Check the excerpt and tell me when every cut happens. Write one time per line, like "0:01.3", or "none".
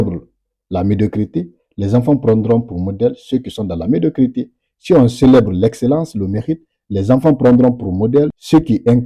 none